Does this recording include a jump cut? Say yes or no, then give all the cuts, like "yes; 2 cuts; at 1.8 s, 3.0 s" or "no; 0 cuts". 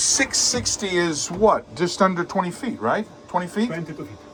no; 0 cuts